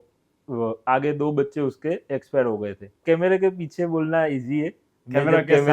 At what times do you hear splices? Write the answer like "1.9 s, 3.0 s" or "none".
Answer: 3.0 s